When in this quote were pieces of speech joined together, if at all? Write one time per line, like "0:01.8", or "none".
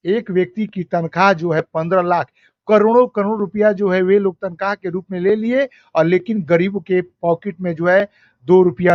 none